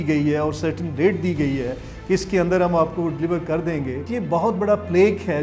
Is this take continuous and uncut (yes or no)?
no